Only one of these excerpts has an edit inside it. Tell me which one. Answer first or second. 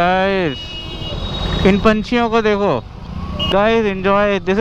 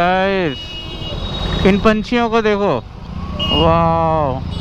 first